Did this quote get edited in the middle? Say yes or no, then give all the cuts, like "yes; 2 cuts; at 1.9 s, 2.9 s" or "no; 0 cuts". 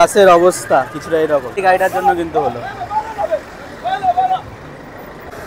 no; 0 cuts